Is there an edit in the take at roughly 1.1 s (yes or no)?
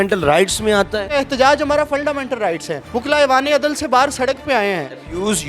yes